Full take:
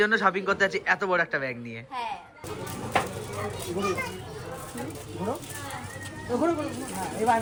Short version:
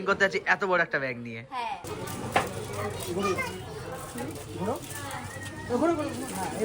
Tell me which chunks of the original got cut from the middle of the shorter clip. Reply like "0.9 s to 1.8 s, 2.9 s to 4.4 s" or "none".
2.2 s to 2.4 s